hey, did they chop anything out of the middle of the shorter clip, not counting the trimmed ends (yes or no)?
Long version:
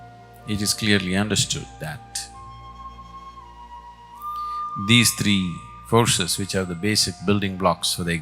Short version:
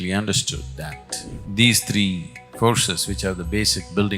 yes